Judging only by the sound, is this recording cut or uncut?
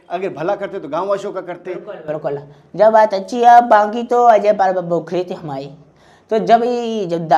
uncut